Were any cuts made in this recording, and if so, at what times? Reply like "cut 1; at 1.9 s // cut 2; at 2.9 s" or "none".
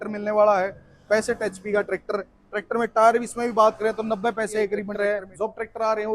cut 1; at 4.9 s